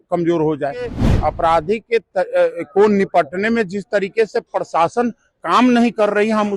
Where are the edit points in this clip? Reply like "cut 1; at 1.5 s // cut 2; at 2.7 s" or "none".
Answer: cut 1; at 1.1 s